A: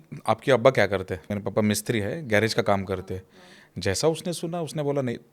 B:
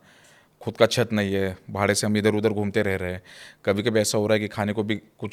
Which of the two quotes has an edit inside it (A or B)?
A